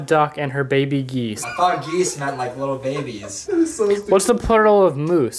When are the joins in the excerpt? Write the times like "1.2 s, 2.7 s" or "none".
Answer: 1.4 s, 3.4 s